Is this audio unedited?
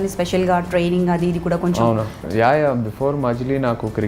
no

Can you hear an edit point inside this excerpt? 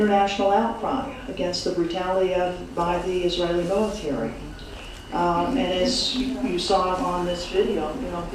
no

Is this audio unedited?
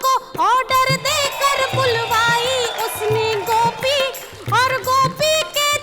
no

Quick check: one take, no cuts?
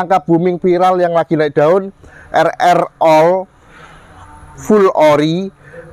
yes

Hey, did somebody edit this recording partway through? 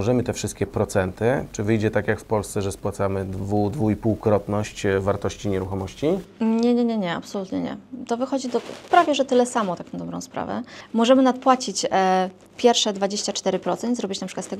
no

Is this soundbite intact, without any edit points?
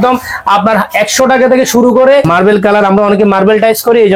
no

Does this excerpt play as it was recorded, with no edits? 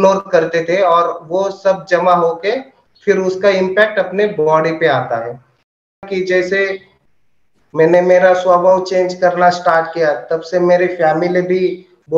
no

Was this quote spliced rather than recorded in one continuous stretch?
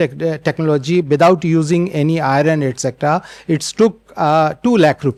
no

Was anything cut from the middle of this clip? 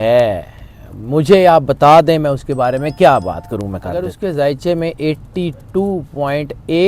yes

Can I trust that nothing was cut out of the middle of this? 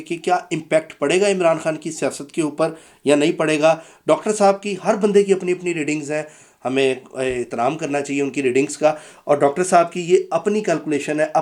yes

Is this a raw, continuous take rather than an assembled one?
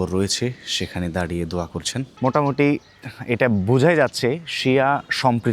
no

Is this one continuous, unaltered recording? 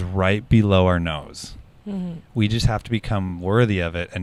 yes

